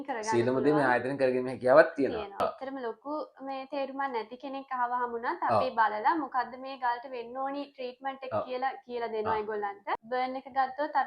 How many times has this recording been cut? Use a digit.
2